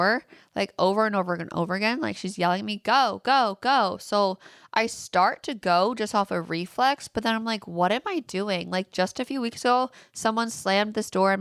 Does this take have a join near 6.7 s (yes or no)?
no